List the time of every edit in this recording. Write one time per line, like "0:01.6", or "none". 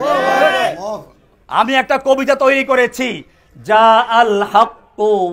none